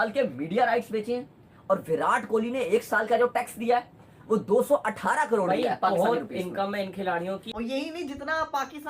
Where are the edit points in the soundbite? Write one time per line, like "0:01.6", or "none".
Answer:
0:03.0
0:07.5